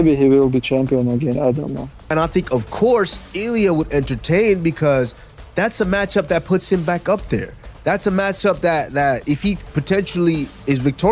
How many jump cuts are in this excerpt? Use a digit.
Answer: 1